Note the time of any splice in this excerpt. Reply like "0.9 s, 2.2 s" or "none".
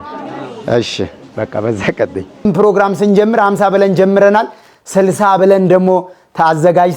2.4 s